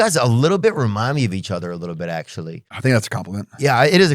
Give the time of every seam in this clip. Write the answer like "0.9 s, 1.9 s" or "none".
2.6 s